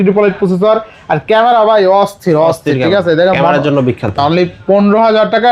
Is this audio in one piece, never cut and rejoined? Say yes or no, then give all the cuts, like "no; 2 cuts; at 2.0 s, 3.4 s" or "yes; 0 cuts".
no; 1 cut; at 4.1 s